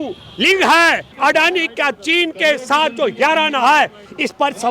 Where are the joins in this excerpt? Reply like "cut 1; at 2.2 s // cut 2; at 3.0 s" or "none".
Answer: cut 1; at 1.1 s